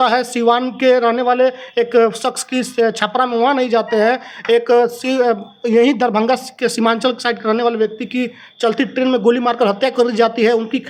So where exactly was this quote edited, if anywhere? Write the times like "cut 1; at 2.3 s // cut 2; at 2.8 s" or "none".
none